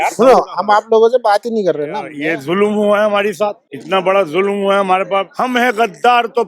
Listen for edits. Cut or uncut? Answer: cut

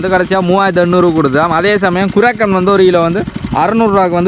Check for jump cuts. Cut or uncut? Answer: uncut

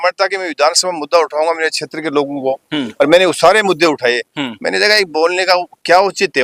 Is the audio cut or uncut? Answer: uncut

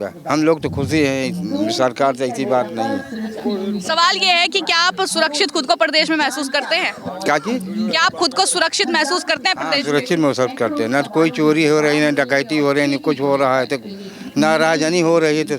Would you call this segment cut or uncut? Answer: uncut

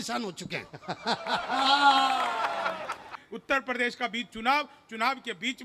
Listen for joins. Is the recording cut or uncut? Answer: cut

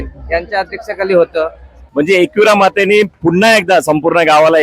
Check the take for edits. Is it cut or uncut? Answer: cut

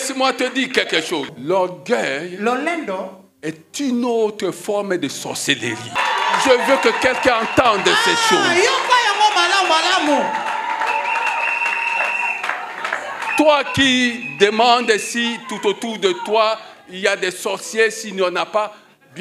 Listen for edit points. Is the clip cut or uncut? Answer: cut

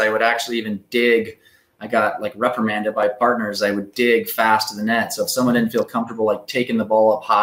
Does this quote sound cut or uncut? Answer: uncut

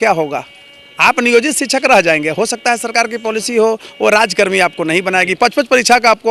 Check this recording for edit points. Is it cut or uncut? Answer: uncut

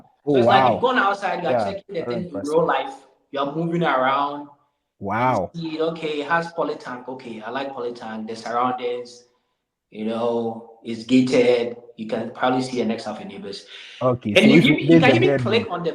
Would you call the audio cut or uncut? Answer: uncut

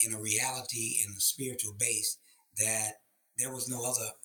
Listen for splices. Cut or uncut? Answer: uncut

